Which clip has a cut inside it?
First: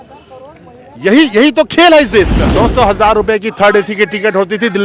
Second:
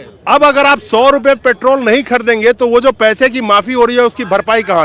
first; 1 cut; at 2.4 s

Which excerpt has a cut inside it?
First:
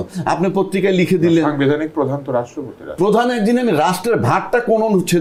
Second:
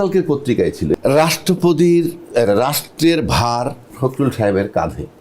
second; 2 cuts; at 0.9 s, 3.9 s

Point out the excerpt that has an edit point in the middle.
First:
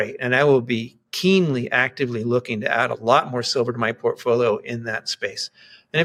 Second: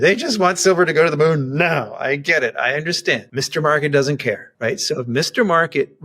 second; 2 cuts; at 3.3 s, 4.5 s

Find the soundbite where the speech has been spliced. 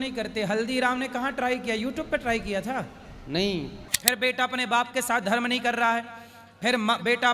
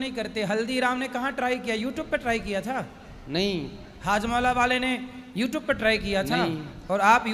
first; 1 cut; at 3.9 s

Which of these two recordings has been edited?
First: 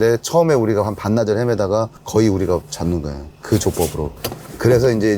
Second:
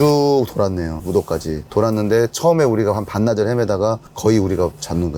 first; 1 cut; at 4.2 s

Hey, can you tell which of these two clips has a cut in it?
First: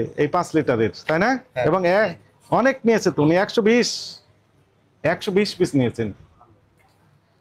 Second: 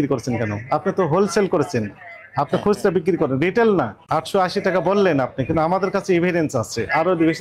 second; 1 cut; at 4.0 s

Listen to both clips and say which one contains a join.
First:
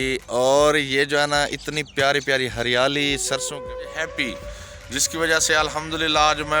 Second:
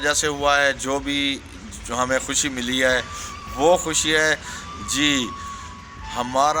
first; 1 cut; at 3.9 s

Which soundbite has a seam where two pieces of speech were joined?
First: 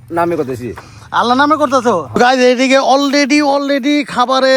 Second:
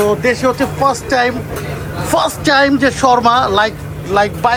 first; 1 cut; at 2.1 s

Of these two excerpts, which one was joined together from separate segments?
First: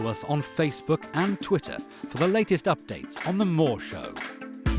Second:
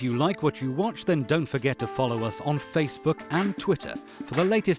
first; 1 cut; at 3.9 s

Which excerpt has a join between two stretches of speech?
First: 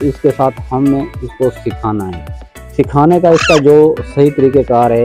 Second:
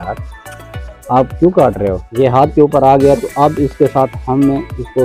second; 1 cut; at 2.0 s

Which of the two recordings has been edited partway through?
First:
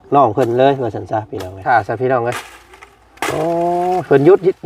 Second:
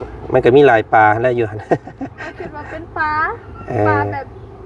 first; 1 cut; at 1.6 s

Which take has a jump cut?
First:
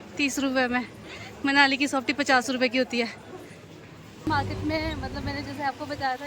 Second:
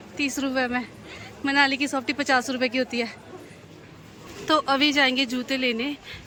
first; 1 cut; at 4.3 s

